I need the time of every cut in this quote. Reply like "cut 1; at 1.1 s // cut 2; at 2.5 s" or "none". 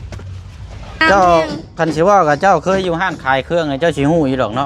cut 1; at 1.0 s